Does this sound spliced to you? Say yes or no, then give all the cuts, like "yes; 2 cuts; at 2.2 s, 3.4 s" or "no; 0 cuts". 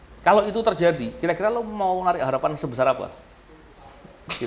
no; 0 cuts